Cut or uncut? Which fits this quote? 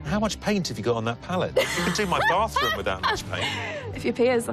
cut